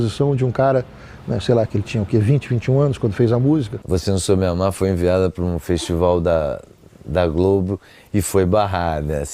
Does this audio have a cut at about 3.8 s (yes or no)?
yes